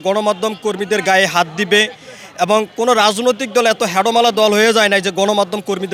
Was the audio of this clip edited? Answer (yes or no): no